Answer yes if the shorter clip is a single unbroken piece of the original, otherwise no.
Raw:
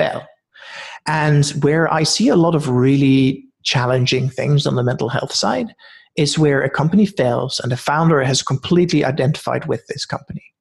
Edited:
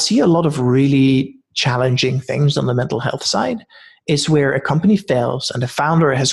yes